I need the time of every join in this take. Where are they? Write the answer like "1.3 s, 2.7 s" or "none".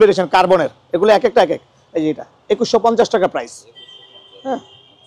none